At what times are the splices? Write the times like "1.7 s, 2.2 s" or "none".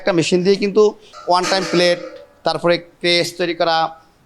1.1 s